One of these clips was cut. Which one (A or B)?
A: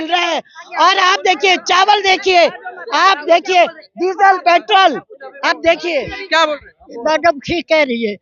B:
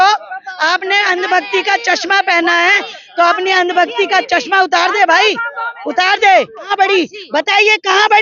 B